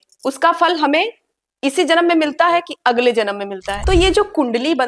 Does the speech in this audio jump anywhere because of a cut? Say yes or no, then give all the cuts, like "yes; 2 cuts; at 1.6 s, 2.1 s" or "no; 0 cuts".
yes; 1 cut; at 3.7 s